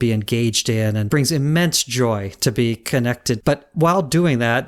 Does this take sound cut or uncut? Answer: cut